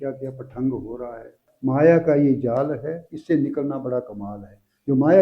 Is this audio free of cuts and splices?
no; 1 cut; at 1.5 s

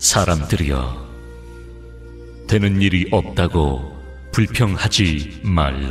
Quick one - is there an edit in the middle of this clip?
no; 0 cuts

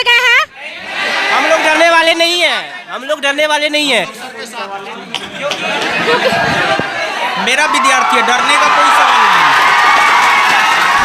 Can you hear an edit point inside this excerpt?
no; 0 cuts

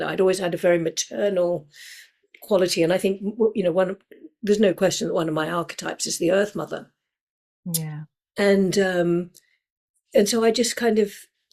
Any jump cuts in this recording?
no; 0 cuts

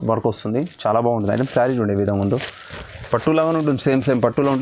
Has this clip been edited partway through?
no; 0 cuts

